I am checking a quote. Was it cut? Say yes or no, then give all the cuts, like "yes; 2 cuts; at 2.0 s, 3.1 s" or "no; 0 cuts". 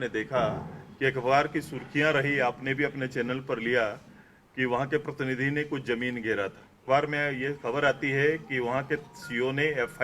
yes; 1 cut; at 6.7 s